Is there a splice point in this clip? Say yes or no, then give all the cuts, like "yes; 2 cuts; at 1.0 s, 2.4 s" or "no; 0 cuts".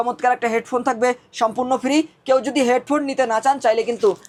no; 0 cuts